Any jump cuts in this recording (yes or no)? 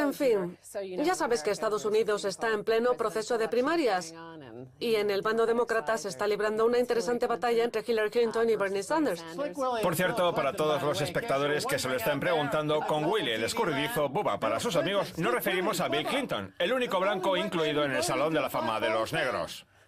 no